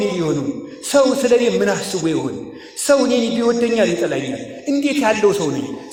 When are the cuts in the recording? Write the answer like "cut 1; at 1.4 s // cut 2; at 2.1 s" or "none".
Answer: none